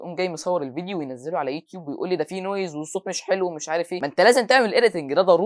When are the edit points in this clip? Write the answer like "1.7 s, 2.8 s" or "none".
none